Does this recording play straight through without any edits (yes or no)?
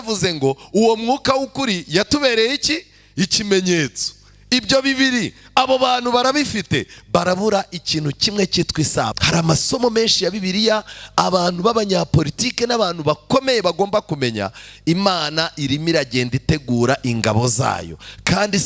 no